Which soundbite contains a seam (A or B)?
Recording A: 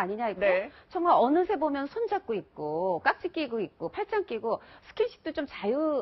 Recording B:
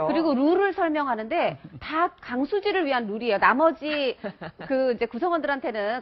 A